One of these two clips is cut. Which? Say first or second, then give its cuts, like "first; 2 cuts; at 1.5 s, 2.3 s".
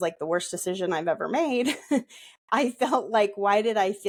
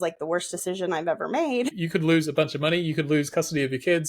second; 1 cut; at 1.8 s